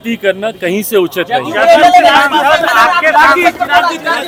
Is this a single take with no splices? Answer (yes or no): yes